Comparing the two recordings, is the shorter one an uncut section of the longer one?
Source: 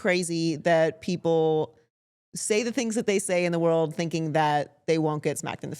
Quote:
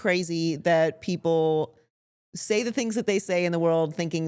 yes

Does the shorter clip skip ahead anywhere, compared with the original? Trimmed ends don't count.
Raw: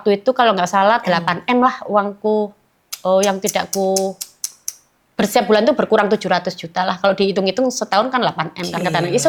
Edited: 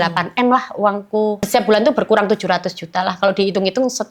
yes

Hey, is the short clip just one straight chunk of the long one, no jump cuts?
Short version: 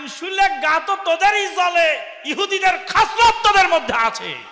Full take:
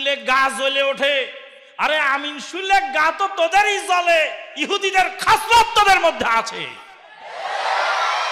yes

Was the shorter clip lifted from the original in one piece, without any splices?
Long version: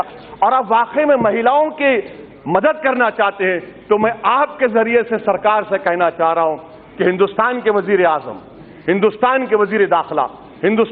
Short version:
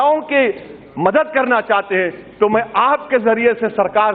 yes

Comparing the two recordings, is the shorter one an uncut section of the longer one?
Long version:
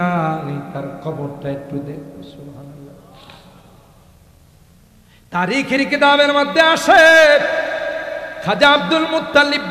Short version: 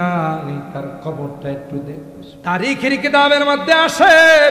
no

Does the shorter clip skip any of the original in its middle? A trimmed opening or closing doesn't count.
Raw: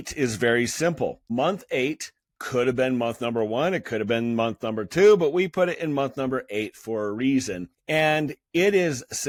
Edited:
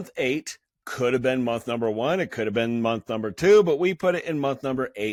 no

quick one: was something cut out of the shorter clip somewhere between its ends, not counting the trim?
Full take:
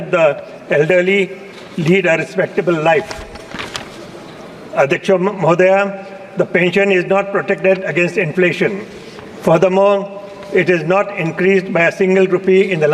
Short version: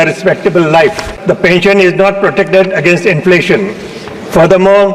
yes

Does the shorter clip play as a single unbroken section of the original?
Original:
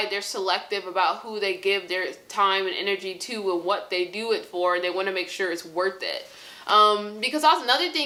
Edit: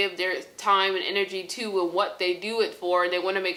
yes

